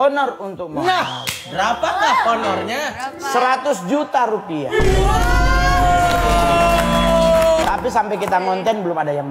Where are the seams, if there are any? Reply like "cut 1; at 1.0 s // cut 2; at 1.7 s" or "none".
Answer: cut 1; at 7.6 s